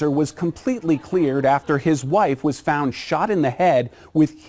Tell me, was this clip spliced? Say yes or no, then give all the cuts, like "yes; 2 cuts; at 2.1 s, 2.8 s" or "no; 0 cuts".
no; 0 cuts